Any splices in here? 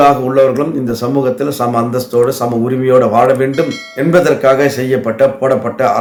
no; 0 cuts

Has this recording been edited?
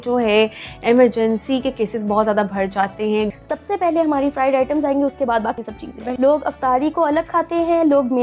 yes; 2 cuts; at 3.4 s, 6.0 s

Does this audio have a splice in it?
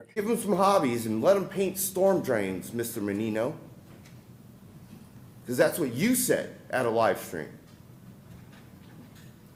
no; 0 cuts

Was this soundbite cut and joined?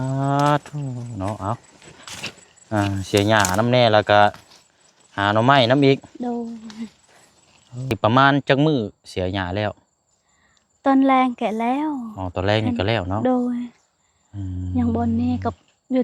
yes; 1 cut; at 8.0 s

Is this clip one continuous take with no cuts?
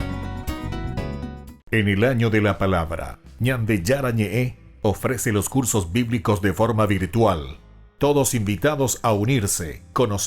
no; 1 cut; at 1.5 s

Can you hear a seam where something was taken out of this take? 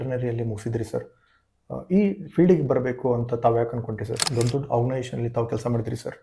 yes; 1 cut; at 4.2 s

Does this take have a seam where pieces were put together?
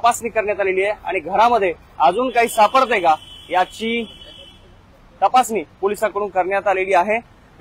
no; 0 cuts

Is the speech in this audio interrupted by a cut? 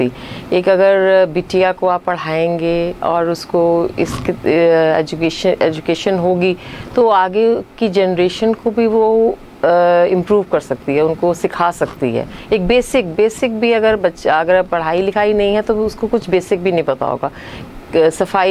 yes; 2 cuts; at 6.7 s, 7.5 s

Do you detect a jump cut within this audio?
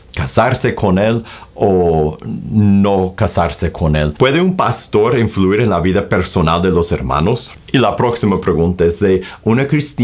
yes; 2 cuts; at 4.1 s, 7.5 s

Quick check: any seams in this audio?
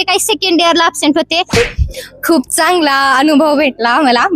yes; 1 cut; at 1.5 s

